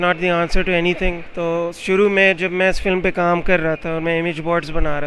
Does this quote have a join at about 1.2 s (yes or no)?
yes